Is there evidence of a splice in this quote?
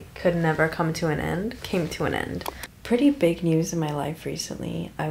yes; 1 cut; at 2.5 s

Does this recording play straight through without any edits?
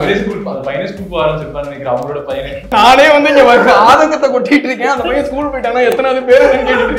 no; 1 cut; at 2.7 s

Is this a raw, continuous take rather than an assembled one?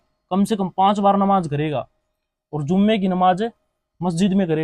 yes; 0 cuts

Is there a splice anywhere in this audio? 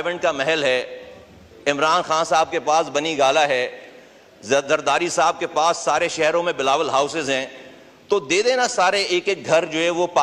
no; 0 cuts

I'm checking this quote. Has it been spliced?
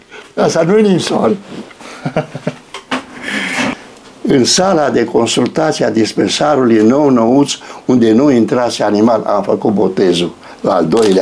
yes; 1 cut; at 3.7 s

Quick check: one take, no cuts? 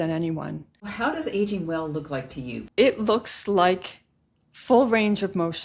no; 2 cuts; at 0.9 s, 2.6 s

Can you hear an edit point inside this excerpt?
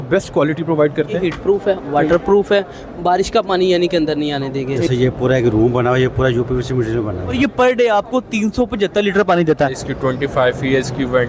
yes; 4 cuts; at 1.2 s, 4.9 s, 7.3 s, 9.8 s

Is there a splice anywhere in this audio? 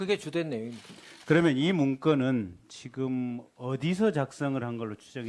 yes; 1 cut; at 3.4 s

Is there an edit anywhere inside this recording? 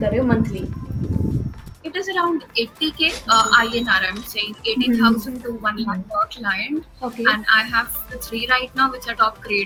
no; 0 cuts

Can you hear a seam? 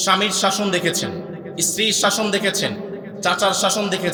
no; 0 cuts

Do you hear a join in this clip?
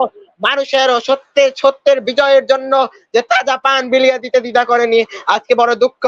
no; 0 cuts

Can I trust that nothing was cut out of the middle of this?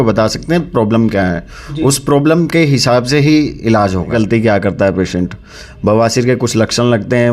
no; 1 cut; at 4.1 s

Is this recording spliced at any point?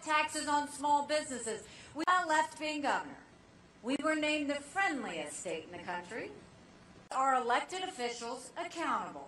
no; 0 cuts

